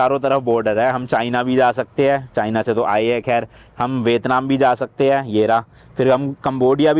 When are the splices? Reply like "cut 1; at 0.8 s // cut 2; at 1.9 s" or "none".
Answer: none